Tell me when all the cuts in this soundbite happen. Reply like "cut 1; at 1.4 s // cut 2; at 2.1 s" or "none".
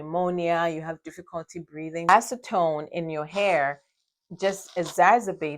cut 1; at 2.1 s